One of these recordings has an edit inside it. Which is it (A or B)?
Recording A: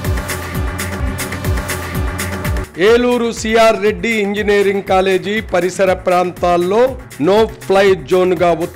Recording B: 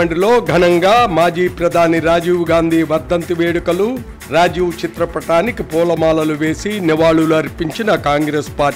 A